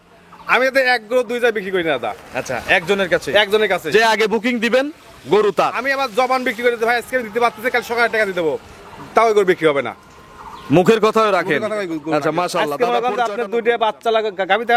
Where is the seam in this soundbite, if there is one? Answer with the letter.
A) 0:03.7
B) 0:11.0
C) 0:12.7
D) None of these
C